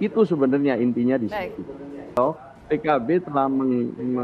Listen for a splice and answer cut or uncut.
cut